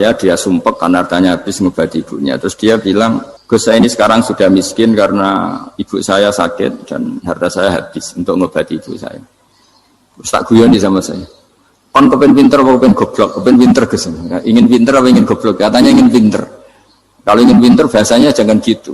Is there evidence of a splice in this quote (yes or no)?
yes